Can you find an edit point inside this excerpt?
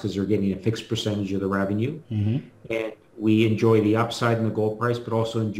no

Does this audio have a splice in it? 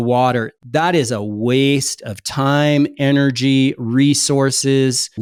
no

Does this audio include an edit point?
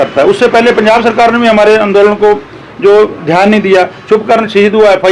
no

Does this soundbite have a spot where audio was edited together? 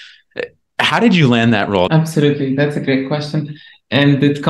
yes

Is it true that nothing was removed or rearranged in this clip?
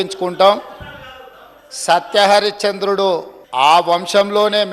no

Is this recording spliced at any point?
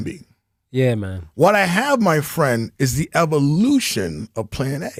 no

